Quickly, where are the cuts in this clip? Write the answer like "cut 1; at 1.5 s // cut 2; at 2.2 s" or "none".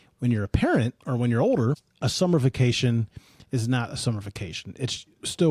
cut 1; at 1.9 s